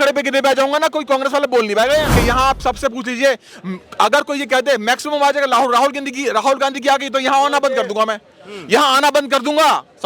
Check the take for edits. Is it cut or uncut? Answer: cut